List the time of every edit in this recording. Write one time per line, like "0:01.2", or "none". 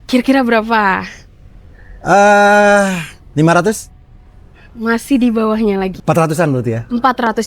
0:03.2
0:05.9